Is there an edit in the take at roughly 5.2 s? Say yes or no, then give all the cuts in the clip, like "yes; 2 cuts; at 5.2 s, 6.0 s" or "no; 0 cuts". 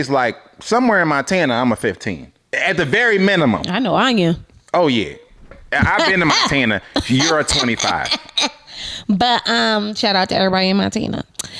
no; 0 cuts